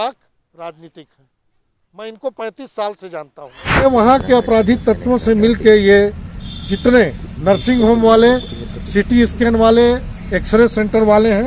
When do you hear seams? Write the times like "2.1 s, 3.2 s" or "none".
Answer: 3.8 s